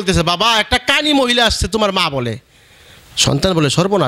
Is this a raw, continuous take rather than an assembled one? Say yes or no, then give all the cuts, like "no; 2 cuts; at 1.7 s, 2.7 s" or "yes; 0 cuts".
yes; 0 cuts